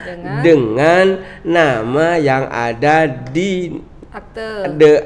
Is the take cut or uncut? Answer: uncut